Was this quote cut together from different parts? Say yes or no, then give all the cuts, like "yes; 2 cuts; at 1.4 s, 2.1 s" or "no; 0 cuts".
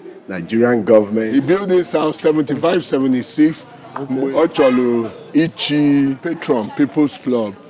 yes; 3 cuts; at 1.3 s, 4.2 s, 6.3 s